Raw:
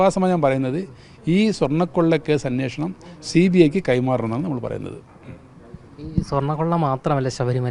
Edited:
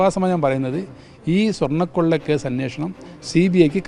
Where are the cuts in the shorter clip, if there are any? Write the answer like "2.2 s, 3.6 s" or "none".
none